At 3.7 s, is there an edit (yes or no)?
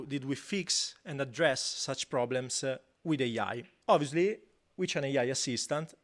yes